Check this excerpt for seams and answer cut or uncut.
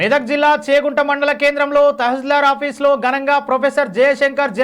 uncut